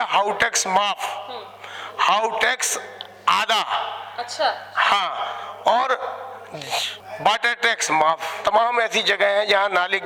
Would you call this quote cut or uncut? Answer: cut